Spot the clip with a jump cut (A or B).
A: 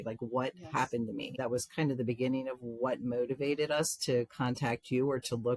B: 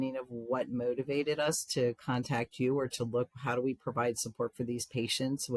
A